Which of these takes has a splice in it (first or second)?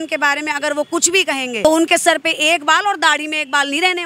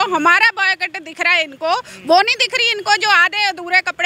first